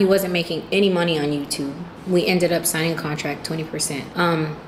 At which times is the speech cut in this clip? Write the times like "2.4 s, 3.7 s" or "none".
1.9 s, 3.8 s